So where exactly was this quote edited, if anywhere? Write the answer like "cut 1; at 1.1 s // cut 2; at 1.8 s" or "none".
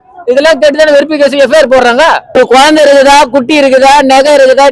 cut 1; at 2.3 s